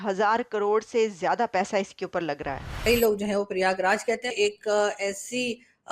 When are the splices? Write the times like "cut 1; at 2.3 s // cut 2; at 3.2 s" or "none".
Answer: cut 1; at 2.7 s // cut 2; at 4.3 s